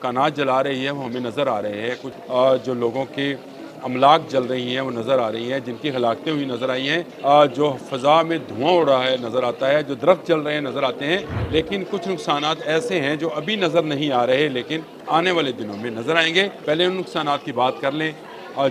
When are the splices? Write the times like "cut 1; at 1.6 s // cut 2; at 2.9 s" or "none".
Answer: cut 1; at 2.1 s // cut 2; at 7.1 s // cut 3; at 11.4 s // cut 4; at 14.9 s // cut 5; at 16.6 s